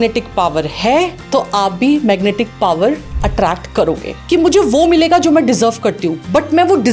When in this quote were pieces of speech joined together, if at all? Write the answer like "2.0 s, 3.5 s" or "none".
4.2 s